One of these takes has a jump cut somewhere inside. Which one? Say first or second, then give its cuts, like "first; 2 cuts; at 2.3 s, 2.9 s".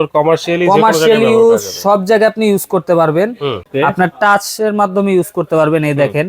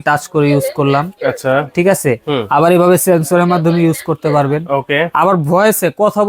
first; 1 cut; at 3.6 s